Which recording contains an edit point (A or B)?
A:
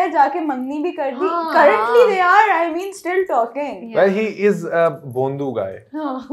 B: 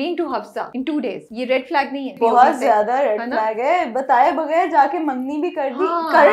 B